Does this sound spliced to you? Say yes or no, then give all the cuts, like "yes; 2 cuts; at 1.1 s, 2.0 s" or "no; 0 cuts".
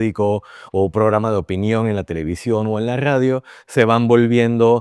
no; 0 cuts